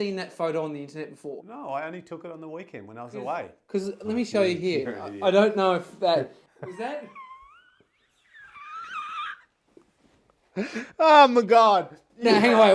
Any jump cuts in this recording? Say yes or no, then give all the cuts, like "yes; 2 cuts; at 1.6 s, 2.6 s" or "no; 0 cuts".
yes; 1 cut; at 1.4 s